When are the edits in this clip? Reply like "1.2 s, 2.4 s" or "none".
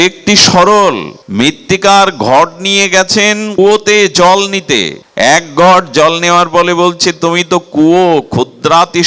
1.1 s, 3.5 s, 5.0 s